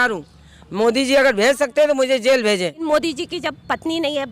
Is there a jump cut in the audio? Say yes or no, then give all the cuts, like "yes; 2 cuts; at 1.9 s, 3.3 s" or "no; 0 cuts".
yes; 1 cut; at 2.8 s